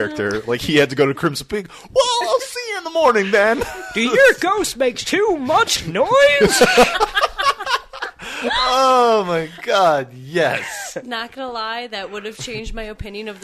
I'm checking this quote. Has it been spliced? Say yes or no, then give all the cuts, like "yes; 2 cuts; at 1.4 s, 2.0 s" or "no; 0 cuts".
no; 0 cuts